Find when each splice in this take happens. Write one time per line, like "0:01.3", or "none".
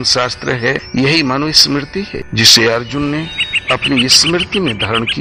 0:00.8
0:02.2